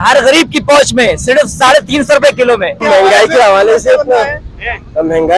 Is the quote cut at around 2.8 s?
yes; 1 cut; at 2.8 s

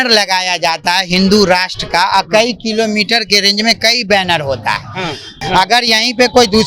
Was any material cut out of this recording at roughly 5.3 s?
yes; 1 cut; at 5.3 s

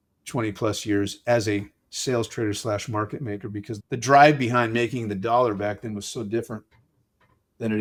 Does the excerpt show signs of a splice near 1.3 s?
no; 0 cuts

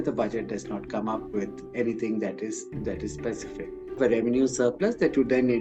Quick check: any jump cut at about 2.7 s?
no; 1 cut; at 4.0 s

